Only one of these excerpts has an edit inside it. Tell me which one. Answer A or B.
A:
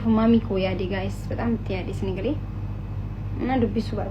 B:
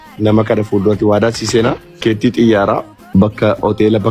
B